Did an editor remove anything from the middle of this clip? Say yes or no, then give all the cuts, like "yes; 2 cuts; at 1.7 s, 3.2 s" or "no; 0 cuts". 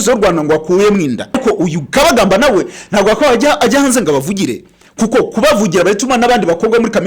yes; 1 cut; at 1.4 s